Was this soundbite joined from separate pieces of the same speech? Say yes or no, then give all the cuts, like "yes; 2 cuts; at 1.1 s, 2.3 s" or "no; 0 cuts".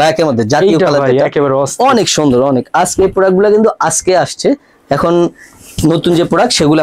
no; 0 cuts